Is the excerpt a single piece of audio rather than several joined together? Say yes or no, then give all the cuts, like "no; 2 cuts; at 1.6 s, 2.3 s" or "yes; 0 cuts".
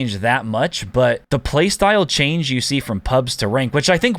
no; 1 cut; at 1.2 s